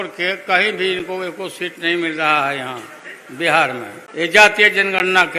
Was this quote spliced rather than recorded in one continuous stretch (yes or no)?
yes